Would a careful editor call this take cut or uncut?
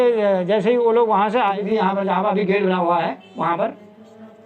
cut